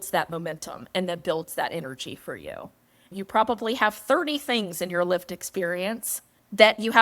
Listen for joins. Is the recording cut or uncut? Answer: cut